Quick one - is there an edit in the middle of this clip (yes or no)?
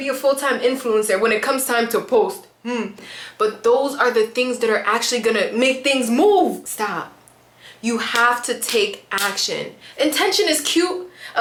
no